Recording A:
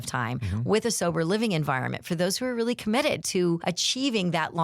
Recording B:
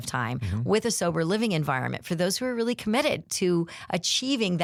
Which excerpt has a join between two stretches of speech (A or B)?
A